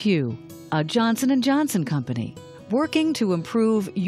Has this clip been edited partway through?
no; 0 cuts

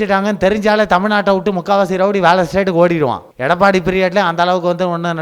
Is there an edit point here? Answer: yes; 1 cut; at 3.3 s

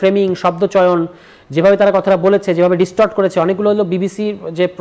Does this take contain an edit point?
no; 0 cuts

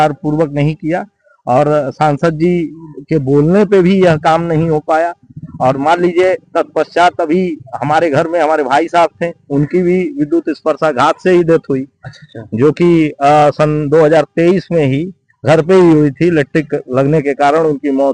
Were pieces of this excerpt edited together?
no; 0 cuts

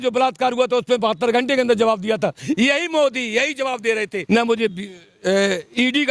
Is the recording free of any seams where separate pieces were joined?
no; 1 cut; at 4.2 s

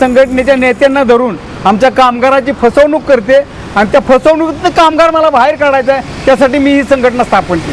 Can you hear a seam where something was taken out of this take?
no; 0 cuts

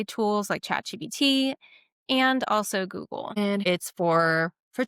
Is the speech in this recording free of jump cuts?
no; 1 cut; at 3.4 s

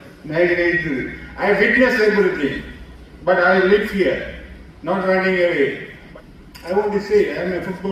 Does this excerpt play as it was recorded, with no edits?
no; 1 cut; at 6.0 s

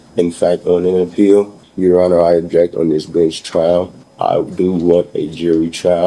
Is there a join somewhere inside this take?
yes; 2 cuts; at 1.6 s, 4.0 s

